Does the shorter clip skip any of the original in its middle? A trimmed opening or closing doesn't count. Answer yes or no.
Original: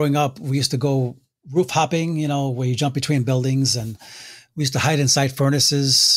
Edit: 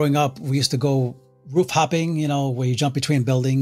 no